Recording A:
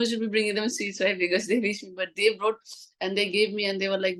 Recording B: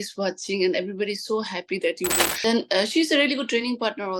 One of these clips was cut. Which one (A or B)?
B